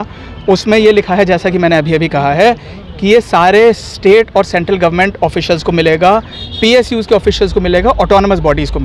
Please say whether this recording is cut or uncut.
uncut